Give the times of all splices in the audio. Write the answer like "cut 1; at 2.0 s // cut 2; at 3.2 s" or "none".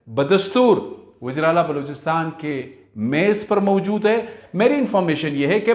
cut 1; at 4.4 s